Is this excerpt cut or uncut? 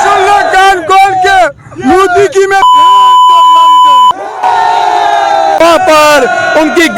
cut